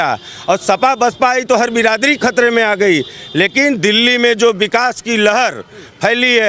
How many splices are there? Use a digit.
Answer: 0